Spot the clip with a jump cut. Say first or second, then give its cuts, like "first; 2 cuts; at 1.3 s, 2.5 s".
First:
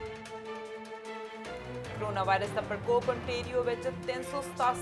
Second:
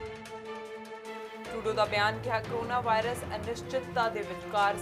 first; 1 cut; at 1.5 s